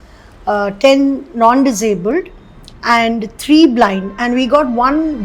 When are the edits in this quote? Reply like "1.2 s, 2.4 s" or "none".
none